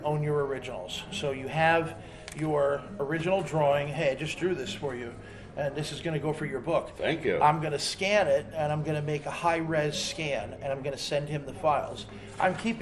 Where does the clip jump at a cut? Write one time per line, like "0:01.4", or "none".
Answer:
0:06.5

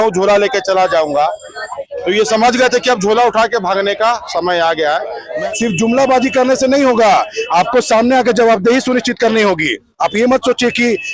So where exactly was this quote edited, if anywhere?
0:05.2

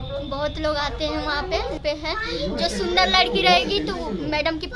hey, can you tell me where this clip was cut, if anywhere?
0:01.8

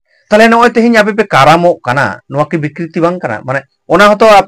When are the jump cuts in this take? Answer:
none

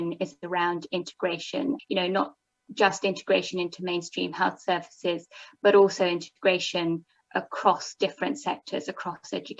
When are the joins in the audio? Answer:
0:01.8

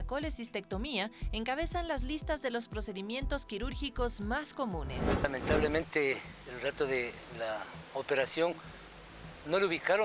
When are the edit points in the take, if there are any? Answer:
0:05.2

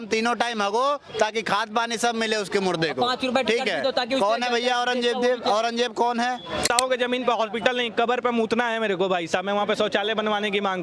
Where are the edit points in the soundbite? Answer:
0:06.6

